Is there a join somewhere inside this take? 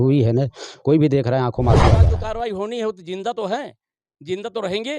yes; 1 cut; at 2.1 s

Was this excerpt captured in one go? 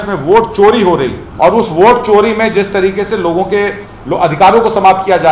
no; 1 cut; at 1.2 s

